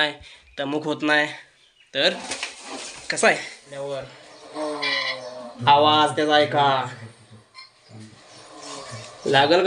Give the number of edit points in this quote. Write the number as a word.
one